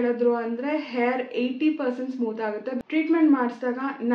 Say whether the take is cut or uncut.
cut